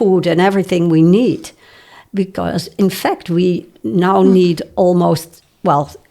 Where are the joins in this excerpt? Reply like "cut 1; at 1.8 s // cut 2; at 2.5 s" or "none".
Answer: none

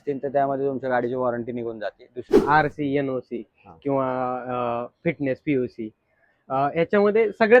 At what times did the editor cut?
cut 1; at 2.4 s

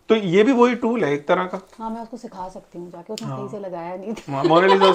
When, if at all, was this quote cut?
none

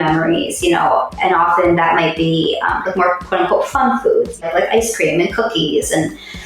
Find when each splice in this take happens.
cut 1; at 4.4 s

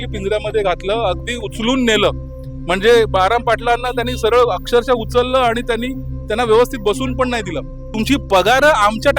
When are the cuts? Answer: cut 1; at 7.8 s

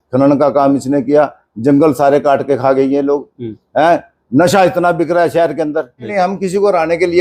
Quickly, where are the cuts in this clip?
cut 1; at 6.1 s

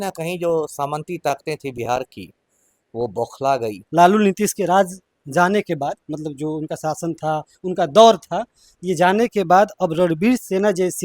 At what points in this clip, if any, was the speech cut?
cut 1; at 3.8 s

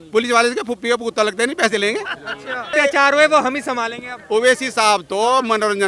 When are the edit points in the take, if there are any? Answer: cut 1; at 2.7 s

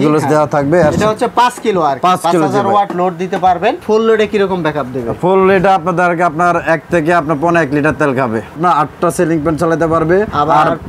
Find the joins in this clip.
cut 1; at 3.8 s // cut 2; at 8.6 s

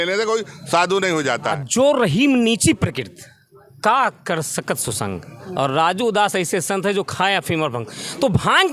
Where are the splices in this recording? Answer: cut 1; at 1.6 s

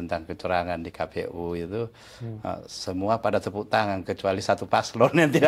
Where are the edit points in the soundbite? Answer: none

